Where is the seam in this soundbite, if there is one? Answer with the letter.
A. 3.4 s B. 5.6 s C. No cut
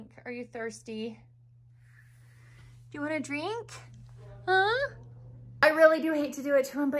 B